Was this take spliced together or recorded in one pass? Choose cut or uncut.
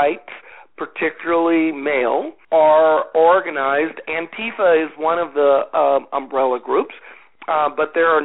cut